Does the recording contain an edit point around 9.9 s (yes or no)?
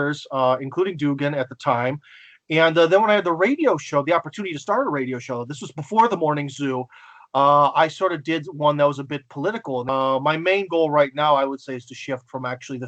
yes